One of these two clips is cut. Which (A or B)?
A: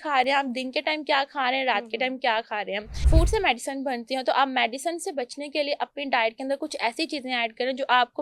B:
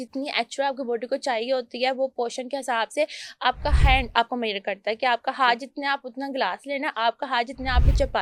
A